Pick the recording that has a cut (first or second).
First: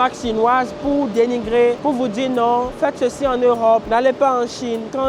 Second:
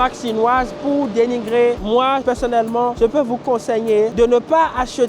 second